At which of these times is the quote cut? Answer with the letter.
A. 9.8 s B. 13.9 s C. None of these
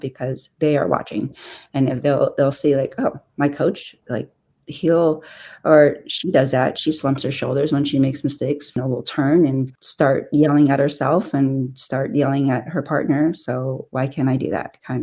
A